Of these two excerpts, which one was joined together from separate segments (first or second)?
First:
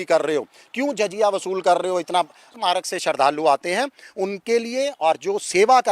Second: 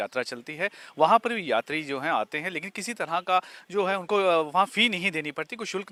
first